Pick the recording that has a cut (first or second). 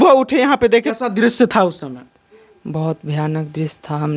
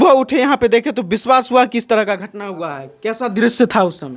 first